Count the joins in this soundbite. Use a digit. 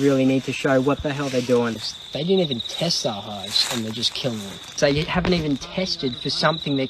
2